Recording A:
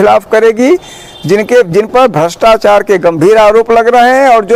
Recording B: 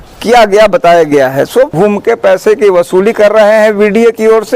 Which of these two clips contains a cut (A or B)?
B